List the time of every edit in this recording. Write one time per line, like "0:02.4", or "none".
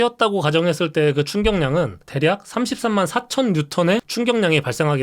0:02.0
0:04.1